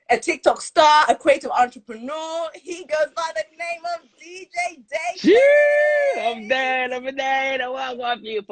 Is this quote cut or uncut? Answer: uncut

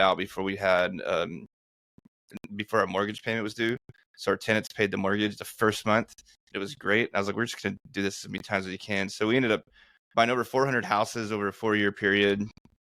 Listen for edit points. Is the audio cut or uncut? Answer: uncut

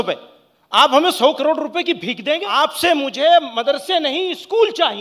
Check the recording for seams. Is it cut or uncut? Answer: cut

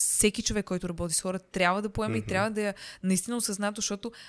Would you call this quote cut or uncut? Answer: uncut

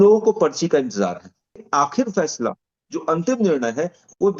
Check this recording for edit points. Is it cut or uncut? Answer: cut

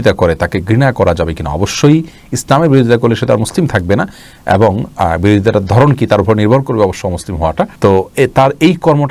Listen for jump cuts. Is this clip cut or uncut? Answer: uncut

